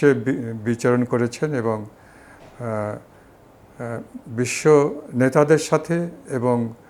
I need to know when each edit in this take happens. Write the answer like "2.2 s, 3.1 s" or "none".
none